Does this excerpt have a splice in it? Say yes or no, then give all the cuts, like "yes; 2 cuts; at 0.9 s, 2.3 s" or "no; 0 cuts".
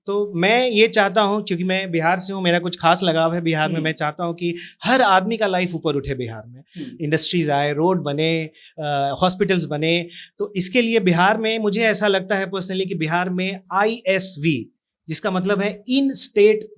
no; 0 cuts